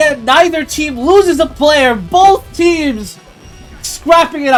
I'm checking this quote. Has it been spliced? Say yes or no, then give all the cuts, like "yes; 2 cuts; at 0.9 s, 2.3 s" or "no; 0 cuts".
no; 0 cuts